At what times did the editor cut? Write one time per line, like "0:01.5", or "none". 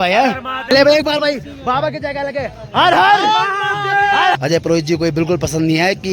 0:00.7
0:04.4